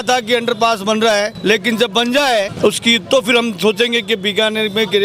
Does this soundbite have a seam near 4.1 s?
no; 2 cuts; at 1.3 s, 2.5 s

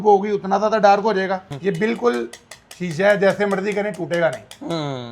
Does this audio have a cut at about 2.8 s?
no; 1 cut; at 1.5 s

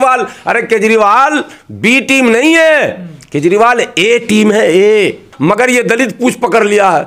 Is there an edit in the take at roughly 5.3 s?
yes; 1 cut; at 5.3 s

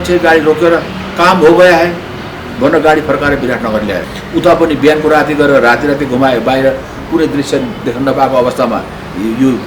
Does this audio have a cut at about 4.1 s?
yes; 1 cut; at 4.1 s

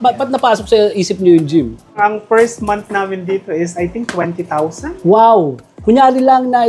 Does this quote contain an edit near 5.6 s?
yes; 2 cuts; at 2.0 s, 5.6 s

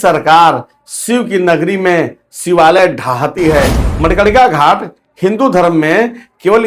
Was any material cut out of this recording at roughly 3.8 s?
yes; 1 cut; at 3.8 s

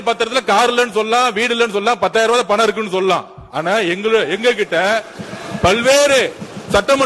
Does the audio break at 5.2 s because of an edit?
no; 0 cuts

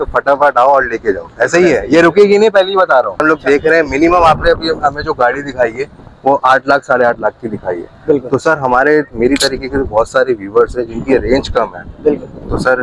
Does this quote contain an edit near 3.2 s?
yes; 1 cut; at 3.2 s

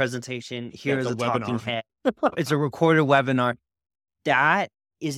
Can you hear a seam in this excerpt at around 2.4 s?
yes; 1 cut; at 2.4 s

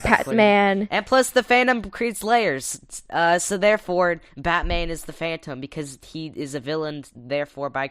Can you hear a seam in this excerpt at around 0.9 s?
yes; 1 cut; at 0.9 s

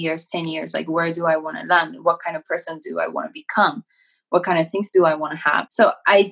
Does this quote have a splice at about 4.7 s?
no; 0 cuts

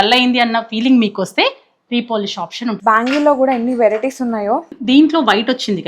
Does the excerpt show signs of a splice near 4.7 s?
yes; 2 cuts; at 2.8 s, 4.7 s

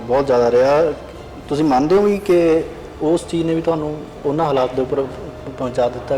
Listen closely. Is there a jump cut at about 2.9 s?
no; 1 cut; at 4.1 s

